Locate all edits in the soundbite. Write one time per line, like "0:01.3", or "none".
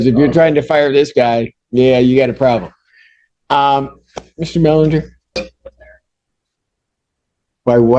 0:05.4